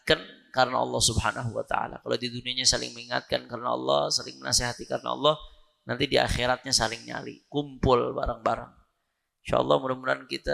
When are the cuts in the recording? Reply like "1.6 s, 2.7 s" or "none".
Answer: none